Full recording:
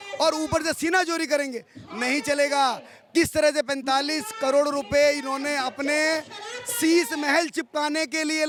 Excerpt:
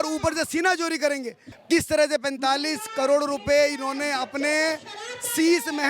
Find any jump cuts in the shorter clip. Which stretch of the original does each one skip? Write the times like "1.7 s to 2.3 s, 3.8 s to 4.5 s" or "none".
1.8 s to 2.9 s